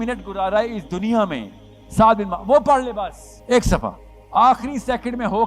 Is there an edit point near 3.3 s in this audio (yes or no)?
yes